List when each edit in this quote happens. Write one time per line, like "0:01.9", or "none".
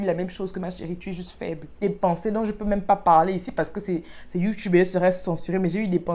0:01.8